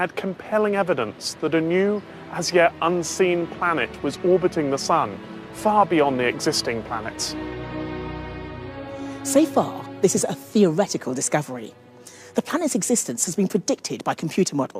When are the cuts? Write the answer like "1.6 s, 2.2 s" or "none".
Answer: none